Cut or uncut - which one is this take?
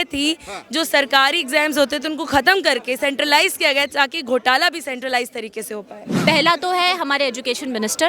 cut